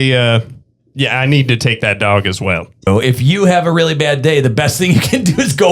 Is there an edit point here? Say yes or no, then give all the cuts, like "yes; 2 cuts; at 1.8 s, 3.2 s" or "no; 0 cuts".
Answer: yes; 1 cut; at 2.9 s